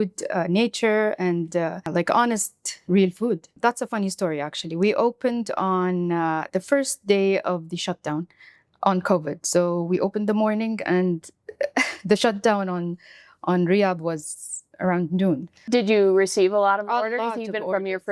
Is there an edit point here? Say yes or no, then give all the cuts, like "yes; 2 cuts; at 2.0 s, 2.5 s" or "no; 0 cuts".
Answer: yes; 3 cuts; at 1.9 s, 3.6 s, 15.5 s